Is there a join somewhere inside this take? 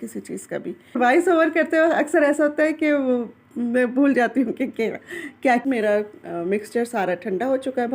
yes; 2 cuts; at 1.0 s, 5.6 s

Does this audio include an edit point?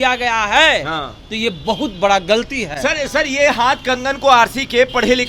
no; 0 cuts

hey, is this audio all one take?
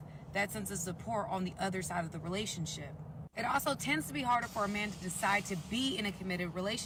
yes; 0 cuts

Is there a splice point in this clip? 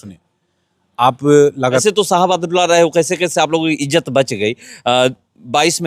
yes; 1 cut; at 1.8 s

